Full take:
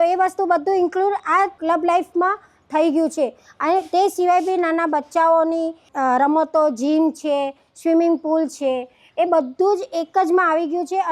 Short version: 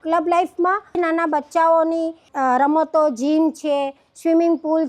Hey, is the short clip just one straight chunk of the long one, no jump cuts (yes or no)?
no